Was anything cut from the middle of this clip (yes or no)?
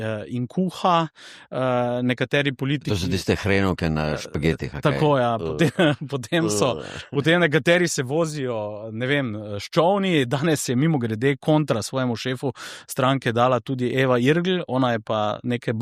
no